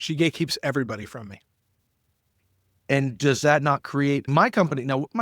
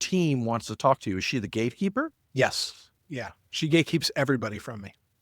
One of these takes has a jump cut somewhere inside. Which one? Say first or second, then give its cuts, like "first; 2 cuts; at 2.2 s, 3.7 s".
first; 1 cut; at 4.2 s